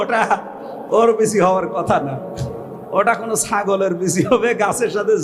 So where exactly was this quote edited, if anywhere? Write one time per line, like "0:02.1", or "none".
none